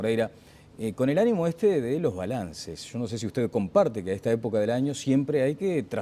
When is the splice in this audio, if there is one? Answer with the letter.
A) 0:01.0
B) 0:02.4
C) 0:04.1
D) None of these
D